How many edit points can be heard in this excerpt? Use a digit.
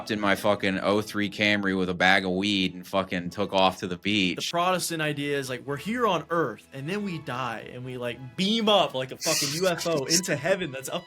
1